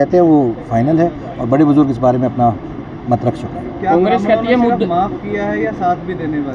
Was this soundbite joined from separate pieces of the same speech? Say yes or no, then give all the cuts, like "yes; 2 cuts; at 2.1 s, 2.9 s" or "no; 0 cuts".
no; 0 cuts